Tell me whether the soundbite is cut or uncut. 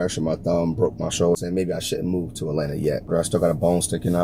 cut